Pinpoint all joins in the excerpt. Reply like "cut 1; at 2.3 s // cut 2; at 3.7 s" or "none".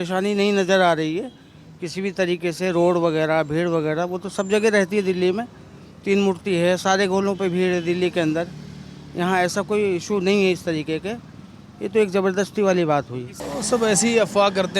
cut 1; at 13.2 s